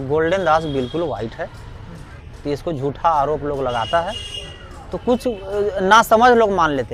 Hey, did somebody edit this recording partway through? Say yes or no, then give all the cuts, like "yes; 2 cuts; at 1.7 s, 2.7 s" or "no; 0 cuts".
no; 0 cuts